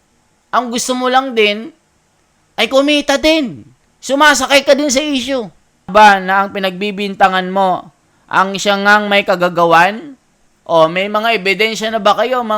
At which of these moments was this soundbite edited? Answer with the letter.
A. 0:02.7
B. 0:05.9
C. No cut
B